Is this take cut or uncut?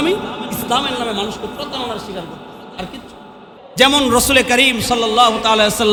uncut